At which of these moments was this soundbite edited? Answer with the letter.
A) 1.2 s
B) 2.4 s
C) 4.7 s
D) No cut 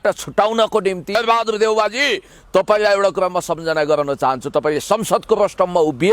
A